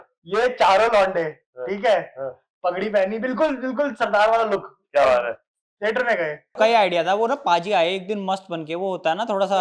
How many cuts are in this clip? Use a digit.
1